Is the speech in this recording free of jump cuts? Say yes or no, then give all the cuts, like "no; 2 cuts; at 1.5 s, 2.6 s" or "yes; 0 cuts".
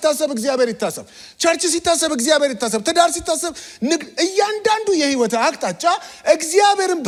yes; 0 cuts